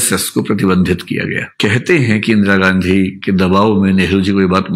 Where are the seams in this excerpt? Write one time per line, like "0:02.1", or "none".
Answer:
0:01.5